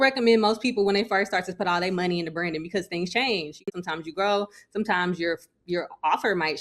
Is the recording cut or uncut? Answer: cut